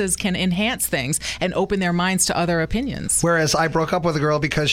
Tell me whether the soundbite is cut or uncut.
uncut